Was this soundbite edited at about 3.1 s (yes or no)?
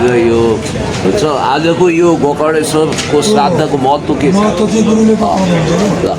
no